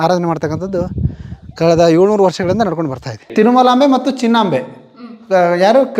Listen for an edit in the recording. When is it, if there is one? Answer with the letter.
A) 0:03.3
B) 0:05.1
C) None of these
A